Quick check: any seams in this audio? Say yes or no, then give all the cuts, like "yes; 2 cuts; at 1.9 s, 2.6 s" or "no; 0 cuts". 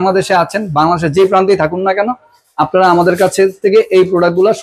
no; 0 cuts